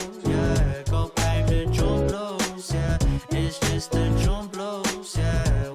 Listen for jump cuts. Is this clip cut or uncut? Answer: cut